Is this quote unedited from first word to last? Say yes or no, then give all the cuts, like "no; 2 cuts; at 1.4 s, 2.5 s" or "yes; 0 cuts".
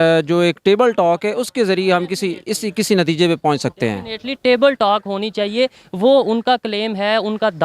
yes; 0 cuts